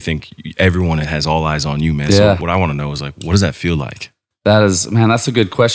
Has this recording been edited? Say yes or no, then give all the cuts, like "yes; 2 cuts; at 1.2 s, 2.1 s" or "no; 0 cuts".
yes; 1 cut; at 2.4 s